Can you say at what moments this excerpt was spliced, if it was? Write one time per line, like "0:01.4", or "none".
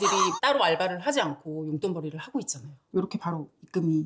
0:02.8